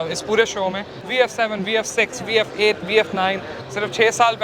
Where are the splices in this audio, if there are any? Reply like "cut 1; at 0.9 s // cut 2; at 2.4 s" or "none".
cut 1; at 0.9 s // cut 2; at 3.5 s